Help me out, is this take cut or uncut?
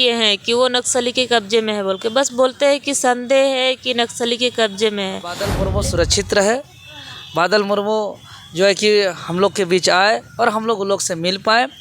cut